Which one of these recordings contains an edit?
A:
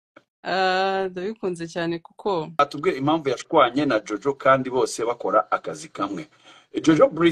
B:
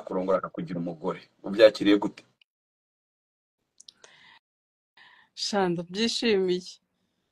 A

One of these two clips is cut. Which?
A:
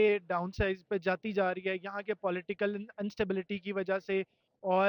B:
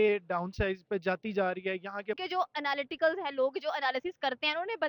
B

